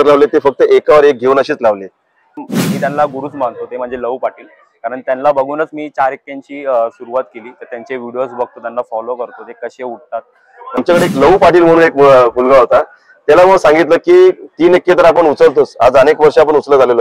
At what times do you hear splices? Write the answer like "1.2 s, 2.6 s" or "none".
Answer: 2.6 s, 10.8 s